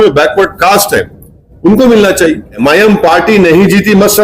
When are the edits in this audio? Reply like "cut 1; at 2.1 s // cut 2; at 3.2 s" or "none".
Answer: cut 1; at 2.6 s